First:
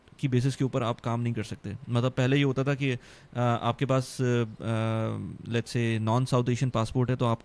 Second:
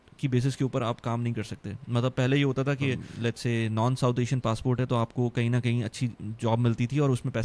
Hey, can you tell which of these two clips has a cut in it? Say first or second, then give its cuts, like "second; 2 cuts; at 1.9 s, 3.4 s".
second; 1 cut; at 3.1 s